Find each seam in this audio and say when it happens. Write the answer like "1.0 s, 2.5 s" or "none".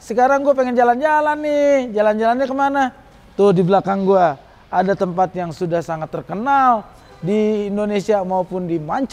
none